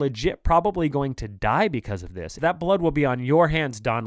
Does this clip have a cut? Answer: yes; 1 cut; at 2.3 s

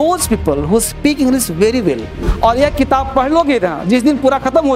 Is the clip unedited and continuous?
no; 1 cut; at 2.3 s

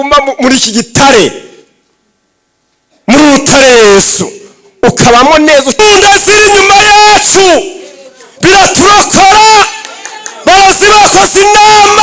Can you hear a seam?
yes; 1 cut; at 5.8 s

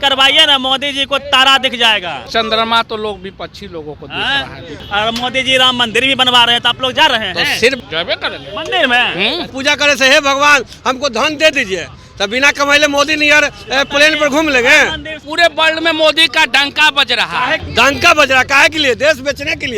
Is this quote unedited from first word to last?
no; 6 cuts; at 2.3 s, 4.8 s, 7.8 s, 9.5 s, 15.2 s, 17.6 s

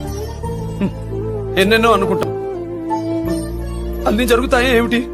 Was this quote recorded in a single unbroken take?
no; 1 cut; at 2.2 s

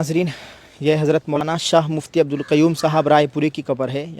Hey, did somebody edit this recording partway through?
yes; 1 cut; at 1.3 s

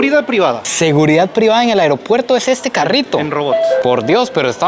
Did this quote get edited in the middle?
no; 0 cuts

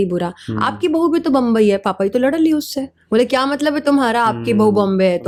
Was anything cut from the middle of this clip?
no; 0 cuts

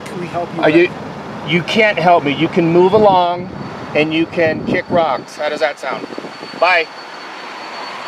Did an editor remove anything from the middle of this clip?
no; 0 cuts

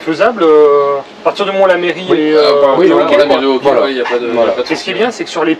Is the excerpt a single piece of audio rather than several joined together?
yes; 0 cuts

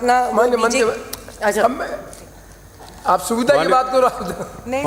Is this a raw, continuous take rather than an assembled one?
yes; 0 cuts

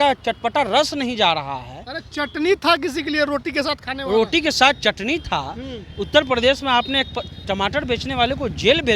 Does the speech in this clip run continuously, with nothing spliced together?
yes; 0 cuts

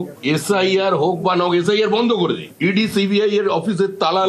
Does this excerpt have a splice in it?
no; 0 cuts

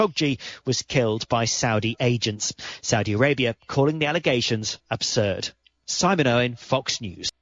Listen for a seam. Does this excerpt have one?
yes; 1 cut; at 6.5 s

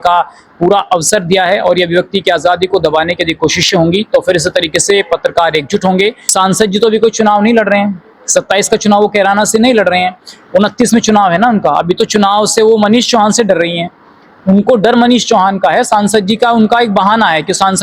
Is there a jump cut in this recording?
yes; 1 cut; at 6.2 s

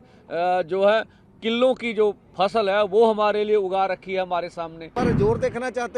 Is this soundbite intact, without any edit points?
no; 1 cut; at 5.0 s

